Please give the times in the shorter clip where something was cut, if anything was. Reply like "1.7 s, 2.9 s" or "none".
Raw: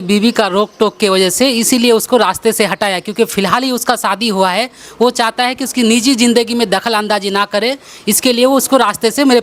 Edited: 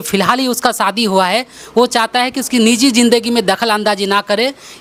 none